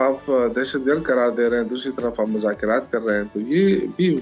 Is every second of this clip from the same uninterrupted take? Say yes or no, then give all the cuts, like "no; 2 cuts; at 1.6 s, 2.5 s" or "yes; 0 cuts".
yes; 0 cuts